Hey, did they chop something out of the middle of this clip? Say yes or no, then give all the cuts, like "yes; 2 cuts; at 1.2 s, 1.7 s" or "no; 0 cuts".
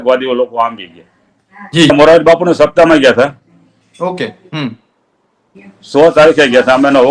yes; 1 cut; at 1.9 s